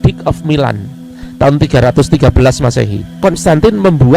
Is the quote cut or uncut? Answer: cut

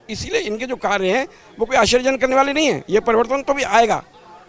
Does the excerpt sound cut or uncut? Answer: uncut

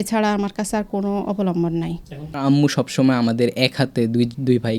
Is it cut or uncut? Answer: cut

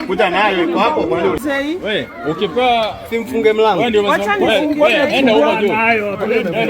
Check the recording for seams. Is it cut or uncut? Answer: cut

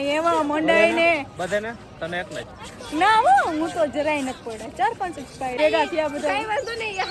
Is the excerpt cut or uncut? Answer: cut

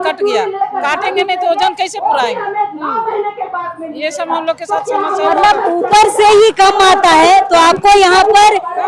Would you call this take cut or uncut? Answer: uncut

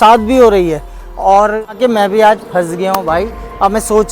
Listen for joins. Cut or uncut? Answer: cut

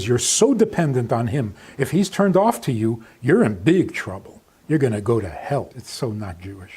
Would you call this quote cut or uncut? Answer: cut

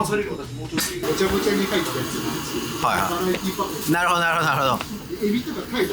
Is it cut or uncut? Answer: cut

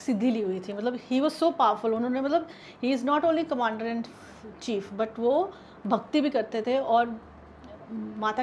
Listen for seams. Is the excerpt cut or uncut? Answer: uncut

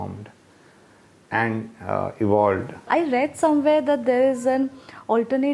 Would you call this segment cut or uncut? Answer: cut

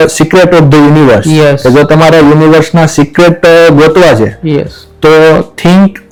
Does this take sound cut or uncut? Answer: uncut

